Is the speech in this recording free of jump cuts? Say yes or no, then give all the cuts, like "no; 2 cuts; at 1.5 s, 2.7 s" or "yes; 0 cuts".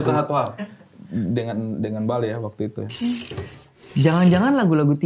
no; 1 cut; at 3.9 s